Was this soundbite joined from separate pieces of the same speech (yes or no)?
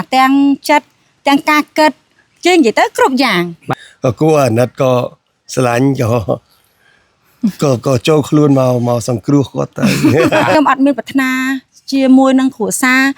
yes